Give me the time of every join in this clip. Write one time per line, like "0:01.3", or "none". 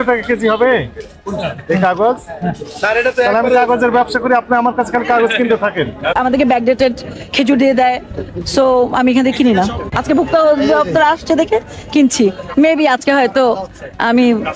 0:06.1
0:09.9